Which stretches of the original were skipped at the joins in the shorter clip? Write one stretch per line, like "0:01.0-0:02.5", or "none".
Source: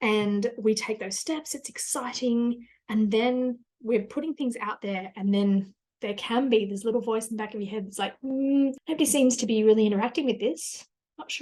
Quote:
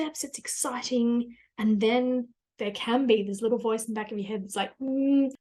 0:03.7-0:05.8